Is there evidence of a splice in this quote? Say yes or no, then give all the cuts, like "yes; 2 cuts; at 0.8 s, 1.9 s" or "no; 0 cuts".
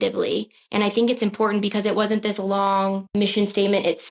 yes; 1 cut; at 3.1 s